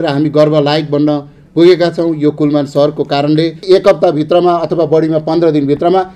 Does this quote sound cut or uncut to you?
cut